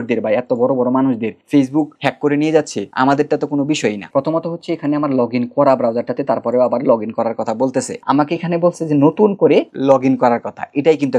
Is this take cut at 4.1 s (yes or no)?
yes